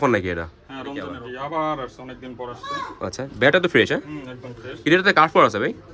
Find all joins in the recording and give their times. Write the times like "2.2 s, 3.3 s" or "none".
1.2 s